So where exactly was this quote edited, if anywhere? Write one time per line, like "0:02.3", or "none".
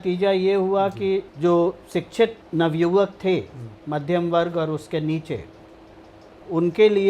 0:01.3
0:02.4